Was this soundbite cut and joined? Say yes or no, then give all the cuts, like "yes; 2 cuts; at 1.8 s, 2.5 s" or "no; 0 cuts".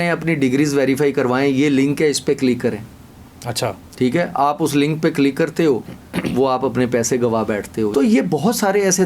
yes; 1 cut; at 7.9 s